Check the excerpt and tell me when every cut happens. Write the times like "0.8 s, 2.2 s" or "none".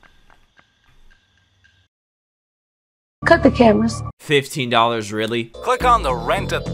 5.5 s